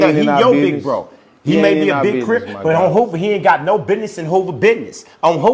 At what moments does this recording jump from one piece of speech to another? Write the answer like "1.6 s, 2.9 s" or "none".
none